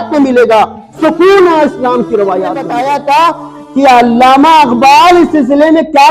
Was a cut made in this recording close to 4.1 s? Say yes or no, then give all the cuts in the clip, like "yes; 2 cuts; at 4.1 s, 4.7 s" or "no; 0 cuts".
no; 1 cut; at 2.7 s